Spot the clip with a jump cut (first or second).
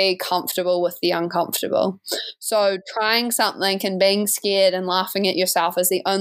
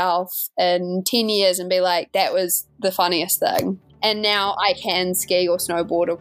second